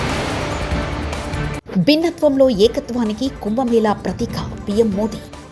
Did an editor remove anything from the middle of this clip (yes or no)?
no